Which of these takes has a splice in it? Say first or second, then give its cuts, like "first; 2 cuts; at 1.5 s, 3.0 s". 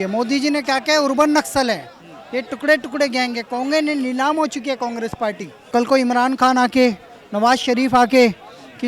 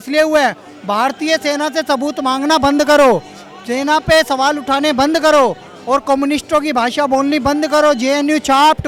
first; 1 cut; at 5.7 s